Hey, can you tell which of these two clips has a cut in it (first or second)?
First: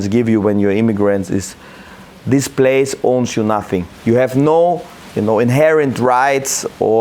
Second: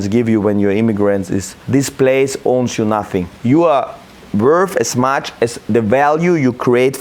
second